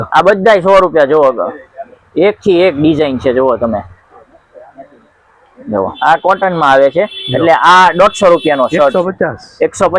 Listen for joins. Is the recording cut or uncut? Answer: cut